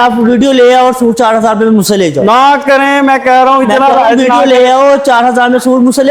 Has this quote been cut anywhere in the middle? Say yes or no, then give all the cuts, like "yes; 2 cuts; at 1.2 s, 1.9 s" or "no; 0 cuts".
no; 0 cuts